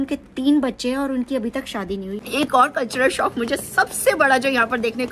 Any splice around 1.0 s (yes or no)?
no